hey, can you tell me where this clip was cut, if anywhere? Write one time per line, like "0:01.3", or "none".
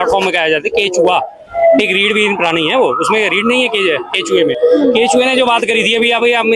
none